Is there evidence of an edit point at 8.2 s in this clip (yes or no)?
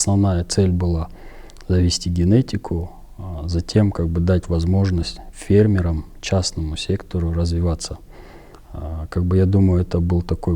no